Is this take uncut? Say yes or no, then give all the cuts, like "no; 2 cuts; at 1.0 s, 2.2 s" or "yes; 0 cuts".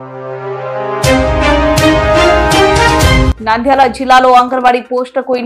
no; 1 cut; at 3.3 s